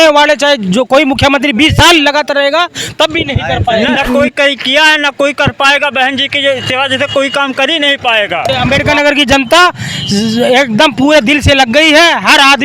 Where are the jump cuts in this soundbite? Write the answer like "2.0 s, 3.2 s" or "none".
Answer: 4.0 s, 8.5 s